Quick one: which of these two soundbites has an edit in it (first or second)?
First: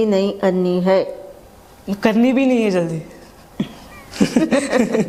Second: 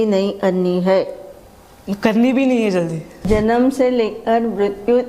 second